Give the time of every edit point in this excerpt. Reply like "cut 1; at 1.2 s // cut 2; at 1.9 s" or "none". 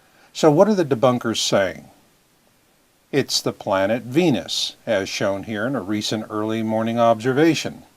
cut 1; at 3.3 s